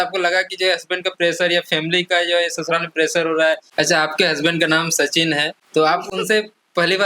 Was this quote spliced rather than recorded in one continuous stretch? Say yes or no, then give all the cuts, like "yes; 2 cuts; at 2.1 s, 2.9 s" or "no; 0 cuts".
yes; 2 cuts; at 3.7 s, 5.6 s